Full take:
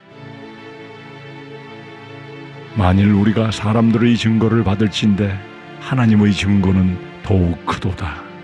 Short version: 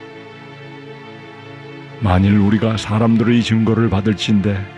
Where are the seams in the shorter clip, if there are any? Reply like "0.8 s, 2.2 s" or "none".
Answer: 2.0 s